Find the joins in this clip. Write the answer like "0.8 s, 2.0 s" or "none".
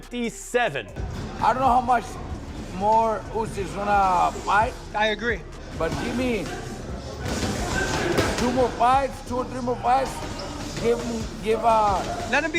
1.0 s